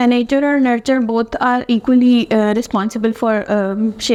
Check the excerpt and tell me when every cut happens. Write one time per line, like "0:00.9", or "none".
none